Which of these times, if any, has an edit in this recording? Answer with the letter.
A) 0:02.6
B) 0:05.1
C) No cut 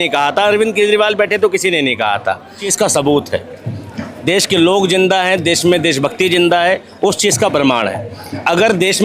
A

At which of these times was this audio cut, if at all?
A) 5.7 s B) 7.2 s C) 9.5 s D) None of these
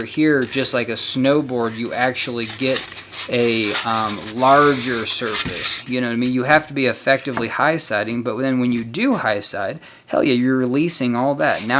A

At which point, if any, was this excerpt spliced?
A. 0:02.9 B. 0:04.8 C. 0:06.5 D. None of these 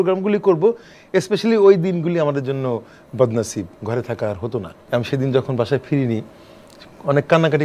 B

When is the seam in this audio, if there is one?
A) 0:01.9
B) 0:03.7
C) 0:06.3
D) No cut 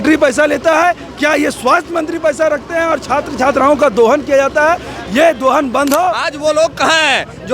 C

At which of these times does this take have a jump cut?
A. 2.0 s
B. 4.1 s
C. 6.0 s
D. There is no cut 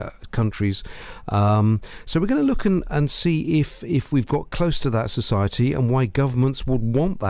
B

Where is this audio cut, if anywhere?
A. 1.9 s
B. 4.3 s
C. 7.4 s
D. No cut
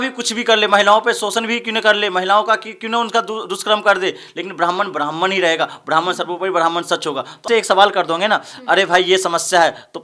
C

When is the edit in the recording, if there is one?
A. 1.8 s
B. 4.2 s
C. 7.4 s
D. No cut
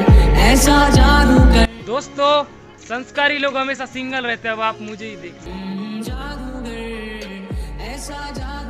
A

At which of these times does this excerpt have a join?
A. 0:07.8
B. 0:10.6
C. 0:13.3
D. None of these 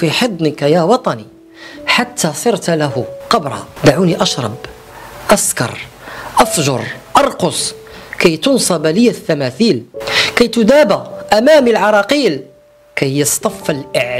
D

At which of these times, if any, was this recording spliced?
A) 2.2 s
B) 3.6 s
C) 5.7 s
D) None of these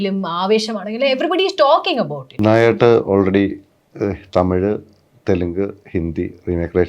A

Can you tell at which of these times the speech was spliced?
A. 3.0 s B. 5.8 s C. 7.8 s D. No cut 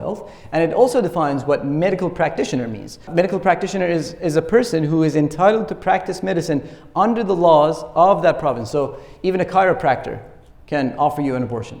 A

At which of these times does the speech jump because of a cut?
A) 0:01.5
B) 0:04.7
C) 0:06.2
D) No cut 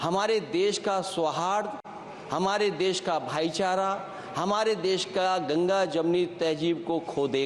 D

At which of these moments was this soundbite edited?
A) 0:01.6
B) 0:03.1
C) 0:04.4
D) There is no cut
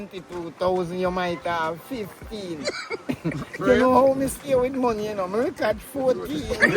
D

